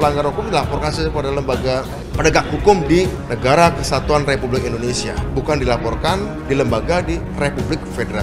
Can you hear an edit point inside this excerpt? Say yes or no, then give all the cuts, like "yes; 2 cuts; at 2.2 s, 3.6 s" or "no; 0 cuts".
yes; 5 cuts; at 2.0 s, 3.2 s, 5.2 s, 6.4 s, 7.3 s